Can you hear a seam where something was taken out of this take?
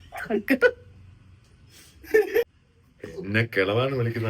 yes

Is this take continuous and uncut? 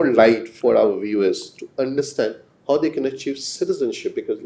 yes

